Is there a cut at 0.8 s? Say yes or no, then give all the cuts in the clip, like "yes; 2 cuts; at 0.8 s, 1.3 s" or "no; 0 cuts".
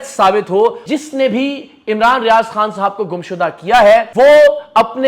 yes; 2 cuts; at 0.8 s, 4.1 s